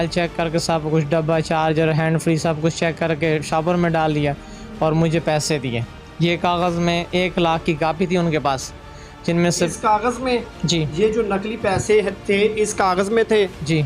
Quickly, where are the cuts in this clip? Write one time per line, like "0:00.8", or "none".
none

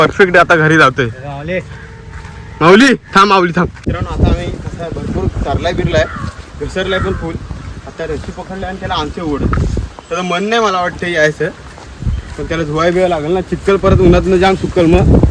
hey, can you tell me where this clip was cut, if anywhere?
0:03.9

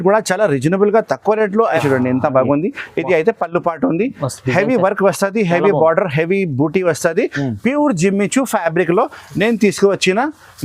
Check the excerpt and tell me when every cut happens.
0:01.8

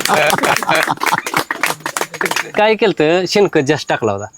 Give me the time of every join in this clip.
0:02.5

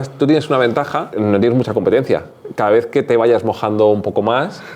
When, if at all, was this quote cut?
0:01.1

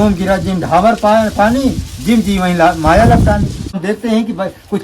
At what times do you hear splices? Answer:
0:03.7

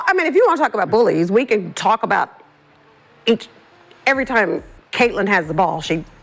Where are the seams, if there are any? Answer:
none

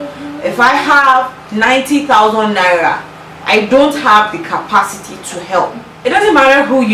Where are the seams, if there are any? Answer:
0:05.8

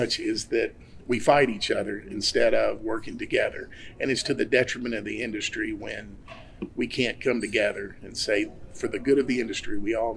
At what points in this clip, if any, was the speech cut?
none

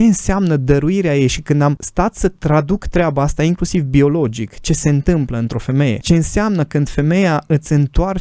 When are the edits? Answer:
0:01.8
0:06.0

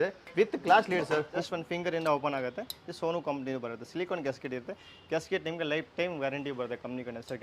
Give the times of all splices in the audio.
0:01.4

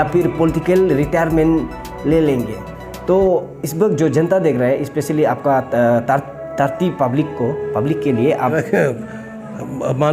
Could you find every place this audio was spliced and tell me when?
0:08.5

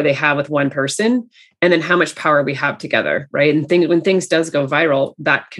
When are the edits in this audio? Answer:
none

